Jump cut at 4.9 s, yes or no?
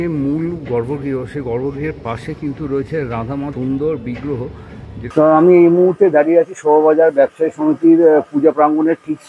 yes